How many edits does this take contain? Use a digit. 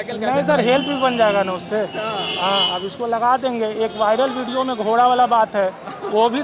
0